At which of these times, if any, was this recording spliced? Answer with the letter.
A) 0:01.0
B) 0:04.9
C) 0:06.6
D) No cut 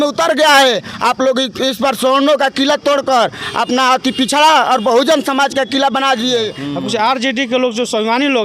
C